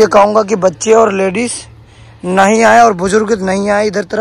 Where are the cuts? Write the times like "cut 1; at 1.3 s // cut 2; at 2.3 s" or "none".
none

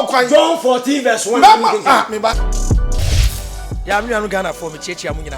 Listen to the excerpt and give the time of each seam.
cut 1; at 2.5 s

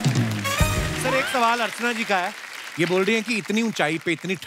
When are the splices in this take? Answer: cut 1; at 0.9 s

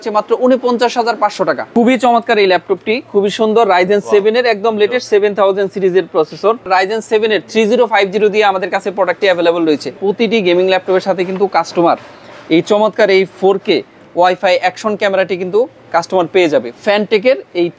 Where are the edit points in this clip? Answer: cut 1; at 1.7 s // cut 2; at 6.7 s // cut 3; at 9.9 s // cut 4; at 16.7 s

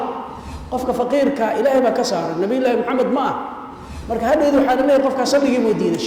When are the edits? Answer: cut 1; at 3.9 s

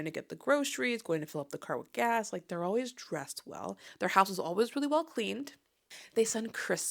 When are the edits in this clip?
cut 1; at 3.8 s // cut 2; at 5.9 s

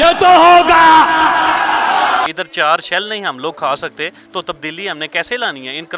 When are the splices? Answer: cut 1; at 2.3 s

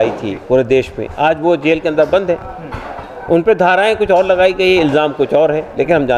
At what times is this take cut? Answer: none

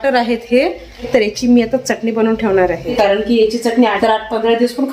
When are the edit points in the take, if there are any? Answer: cut 1; at 1.0 s // cut 2; at 4.0 s

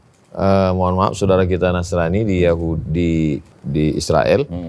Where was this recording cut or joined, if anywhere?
cut 1; at 3.5 s

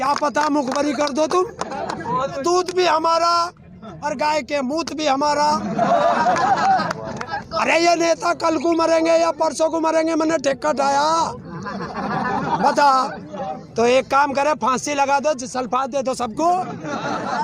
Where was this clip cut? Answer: cut 1; at 2.4 s // cut 2; at 7.4 s // cut 3; at 13.6 s

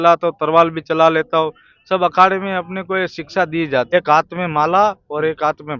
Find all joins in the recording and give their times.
cut 1; at 3.9 s

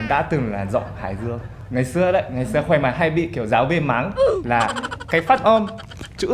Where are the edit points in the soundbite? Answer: none

